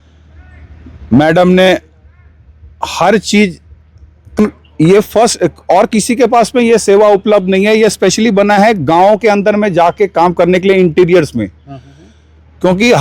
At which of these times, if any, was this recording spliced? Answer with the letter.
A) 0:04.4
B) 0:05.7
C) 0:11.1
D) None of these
A